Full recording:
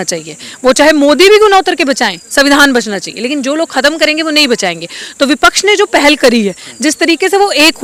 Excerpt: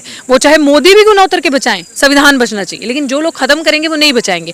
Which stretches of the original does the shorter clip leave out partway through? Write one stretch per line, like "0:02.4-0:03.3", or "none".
none